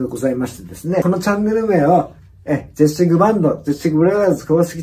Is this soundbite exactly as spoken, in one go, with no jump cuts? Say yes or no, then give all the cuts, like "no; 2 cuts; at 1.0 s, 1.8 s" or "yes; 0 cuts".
no; 1 cut; at 1.0 s